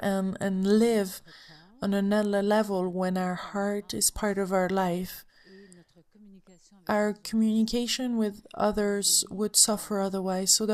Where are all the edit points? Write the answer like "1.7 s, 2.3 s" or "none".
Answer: none